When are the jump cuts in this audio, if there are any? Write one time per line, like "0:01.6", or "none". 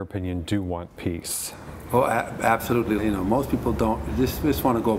0:03.0